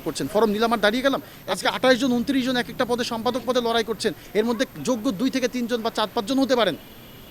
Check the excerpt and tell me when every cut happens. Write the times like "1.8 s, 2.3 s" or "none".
1.3 s